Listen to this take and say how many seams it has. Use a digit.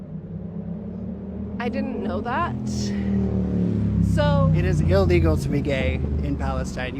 1